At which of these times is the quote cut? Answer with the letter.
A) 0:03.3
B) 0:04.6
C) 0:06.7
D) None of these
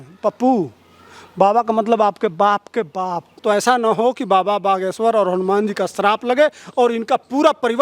A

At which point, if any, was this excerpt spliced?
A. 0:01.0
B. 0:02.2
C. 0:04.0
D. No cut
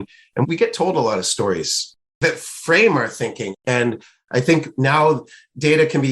B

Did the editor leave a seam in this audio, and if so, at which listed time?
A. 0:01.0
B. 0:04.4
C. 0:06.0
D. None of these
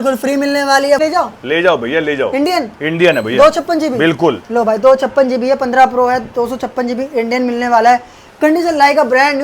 A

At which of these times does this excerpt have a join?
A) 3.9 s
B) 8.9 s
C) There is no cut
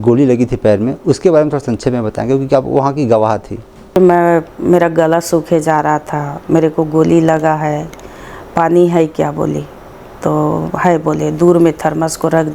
A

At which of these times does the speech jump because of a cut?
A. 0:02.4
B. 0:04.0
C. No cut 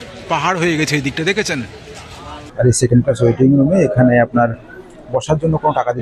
A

